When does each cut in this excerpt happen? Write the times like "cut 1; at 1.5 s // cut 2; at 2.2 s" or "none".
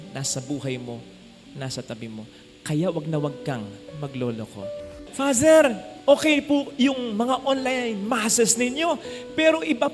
cut 1; at 5.0 s